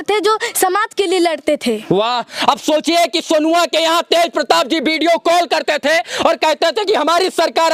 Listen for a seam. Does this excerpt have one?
no; 0 cuts

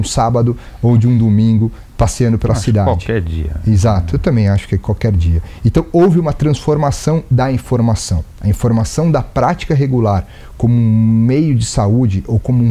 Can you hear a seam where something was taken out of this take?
no; 0 cuts

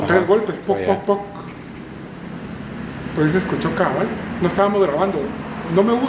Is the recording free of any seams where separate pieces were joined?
yes; 0 cuts

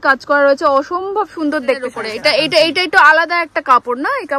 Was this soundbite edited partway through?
yes; 1 cut; at 2.0 s

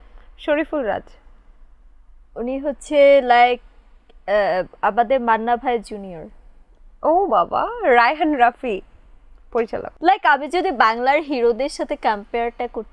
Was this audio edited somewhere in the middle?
yes; 1 cut; at 9.9 s

